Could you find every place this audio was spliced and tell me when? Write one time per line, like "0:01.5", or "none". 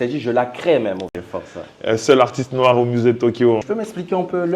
0:01.2
0:03.6